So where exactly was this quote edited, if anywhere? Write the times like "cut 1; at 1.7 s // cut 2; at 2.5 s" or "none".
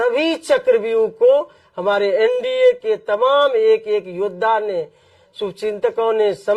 none